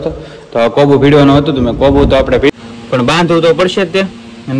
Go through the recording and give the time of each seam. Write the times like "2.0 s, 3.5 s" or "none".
2.5 s